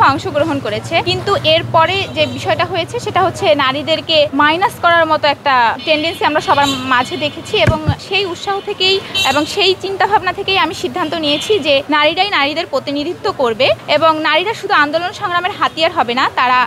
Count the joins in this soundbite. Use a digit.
7